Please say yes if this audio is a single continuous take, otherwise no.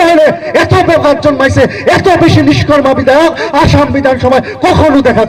yes